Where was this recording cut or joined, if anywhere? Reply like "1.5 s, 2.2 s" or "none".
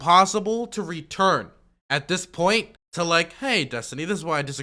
2.8 s